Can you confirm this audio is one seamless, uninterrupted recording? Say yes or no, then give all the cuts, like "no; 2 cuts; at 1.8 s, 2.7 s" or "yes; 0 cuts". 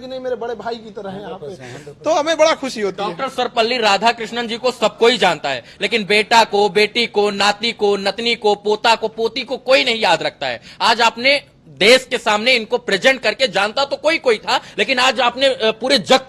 yes; 0 cuts